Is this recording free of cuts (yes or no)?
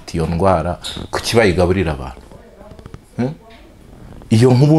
yes